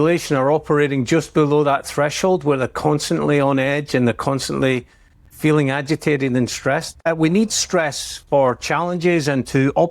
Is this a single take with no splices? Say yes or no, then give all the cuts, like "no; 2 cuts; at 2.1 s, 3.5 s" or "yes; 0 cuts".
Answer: no; 1 cut; at 7.1 s